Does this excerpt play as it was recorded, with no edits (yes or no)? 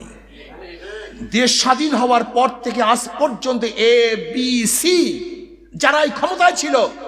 yes